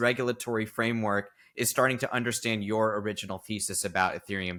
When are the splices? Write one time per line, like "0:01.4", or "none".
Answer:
none